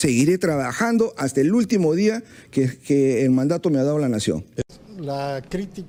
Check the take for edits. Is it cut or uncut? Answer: uncut